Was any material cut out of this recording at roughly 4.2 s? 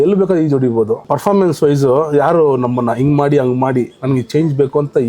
no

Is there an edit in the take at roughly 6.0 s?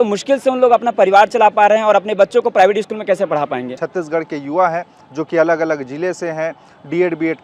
no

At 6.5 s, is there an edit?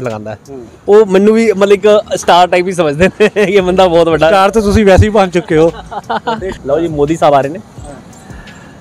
yes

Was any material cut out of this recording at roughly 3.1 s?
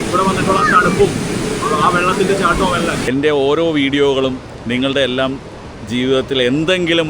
yes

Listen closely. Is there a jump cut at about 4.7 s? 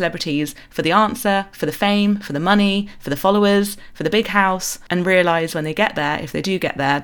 yes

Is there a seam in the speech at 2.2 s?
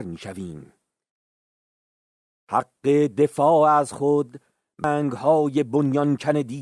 no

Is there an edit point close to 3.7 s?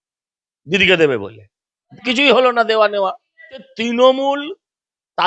yes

